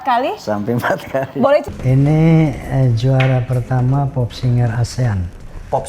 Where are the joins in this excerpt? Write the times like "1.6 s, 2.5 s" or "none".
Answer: 1.7 s